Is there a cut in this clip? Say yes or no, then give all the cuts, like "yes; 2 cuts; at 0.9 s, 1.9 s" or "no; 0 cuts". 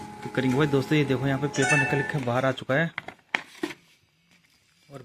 no; 0 cuts